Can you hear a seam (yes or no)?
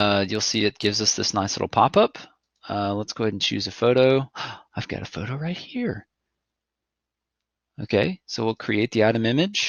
no